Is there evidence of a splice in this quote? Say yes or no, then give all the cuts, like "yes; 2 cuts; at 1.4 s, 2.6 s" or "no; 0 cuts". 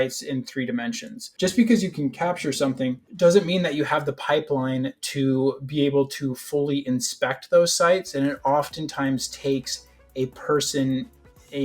yes; 2 cuts; at 1.2 s, 3.0 s